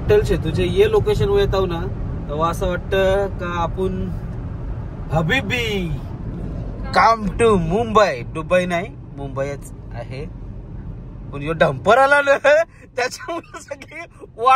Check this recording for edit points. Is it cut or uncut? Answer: uncut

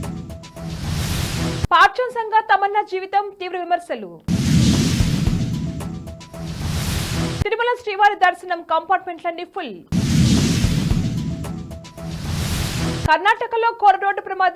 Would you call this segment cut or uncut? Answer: cut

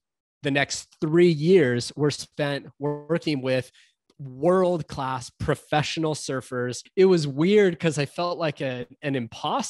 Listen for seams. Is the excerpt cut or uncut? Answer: cut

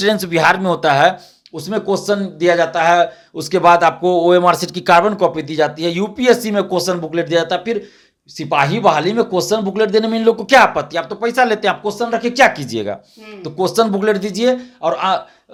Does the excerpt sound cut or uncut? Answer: uncut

